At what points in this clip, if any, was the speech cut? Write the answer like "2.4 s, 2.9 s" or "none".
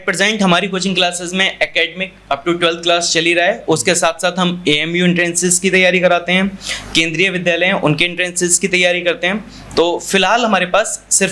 none